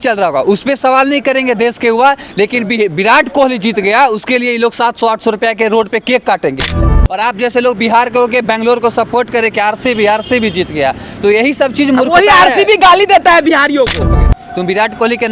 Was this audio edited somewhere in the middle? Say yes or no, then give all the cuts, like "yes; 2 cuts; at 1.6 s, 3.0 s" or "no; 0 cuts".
yes; 2 cuts; at 6.8 s, 14.0 s